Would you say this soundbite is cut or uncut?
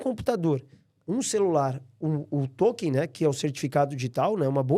uncut